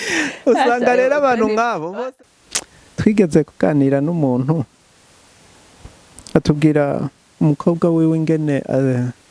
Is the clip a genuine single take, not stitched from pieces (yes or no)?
no